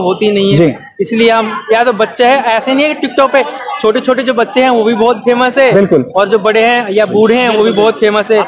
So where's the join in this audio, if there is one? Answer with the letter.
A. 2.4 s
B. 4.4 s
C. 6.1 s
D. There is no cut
D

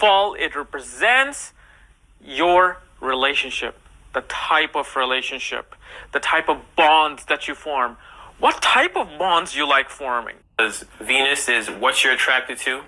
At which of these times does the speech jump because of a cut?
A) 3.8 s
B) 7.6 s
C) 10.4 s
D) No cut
C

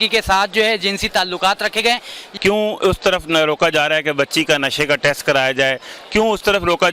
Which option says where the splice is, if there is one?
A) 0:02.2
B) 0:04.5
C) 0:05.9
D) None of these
A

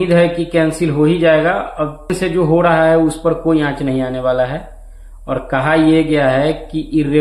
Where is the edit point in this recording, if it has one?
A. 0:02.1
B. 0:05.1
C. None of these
A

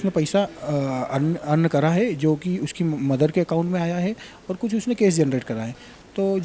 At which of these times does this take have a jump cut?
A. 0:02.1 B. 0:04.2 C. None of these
C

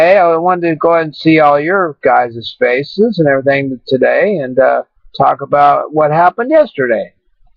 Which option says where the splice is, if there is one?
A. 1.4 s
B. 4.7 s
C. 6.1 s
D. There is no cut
B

